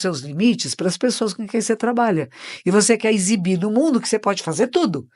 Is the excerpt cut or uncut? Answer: uncut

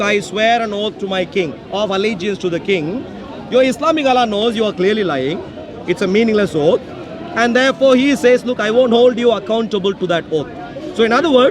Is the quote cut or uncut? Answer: uncut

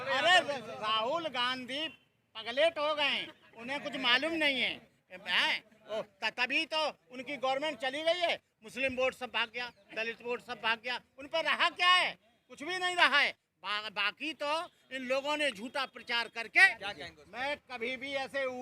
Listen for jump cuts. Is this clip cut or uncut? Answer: cut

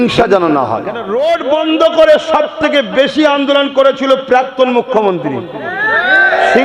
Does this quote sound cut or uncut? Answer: cut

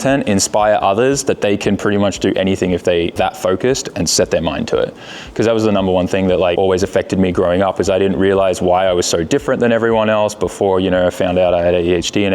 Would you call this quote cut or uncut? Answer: cut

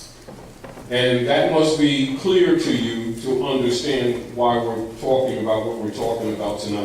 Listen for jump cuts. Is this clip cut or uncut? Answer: cut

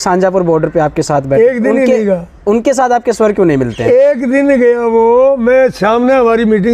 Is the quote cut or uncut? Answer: uncut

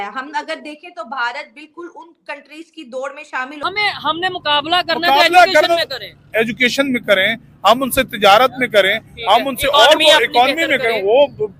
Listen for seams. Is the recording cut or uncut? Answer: cut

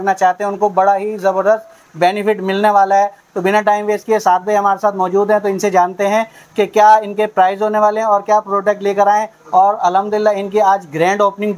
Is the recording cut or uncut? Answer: uncut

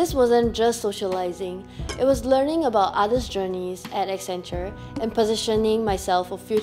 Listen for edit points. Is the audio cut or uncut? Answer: uncut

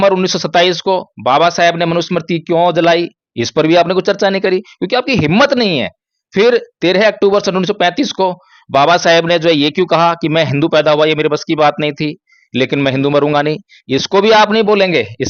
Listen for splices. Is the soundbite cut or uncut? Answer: uncut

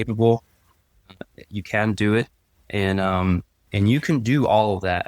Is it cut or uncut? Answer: cut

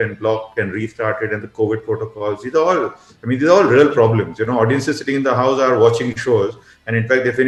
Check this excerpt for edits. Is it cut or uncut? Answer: uncut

